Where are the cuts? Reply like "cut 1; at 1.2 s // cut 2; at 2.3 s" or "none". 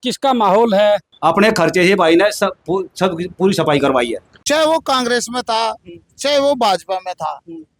cut 1; at 1.1 s // cut 2; at 4.3 s